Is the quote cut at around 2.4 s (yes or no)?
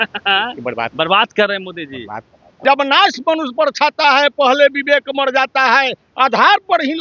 yes